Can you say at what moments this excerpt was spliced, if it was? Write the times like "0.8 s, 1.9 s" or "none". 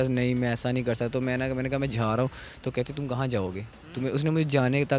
none